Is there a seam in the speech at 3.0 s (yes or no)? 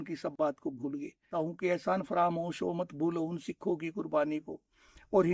no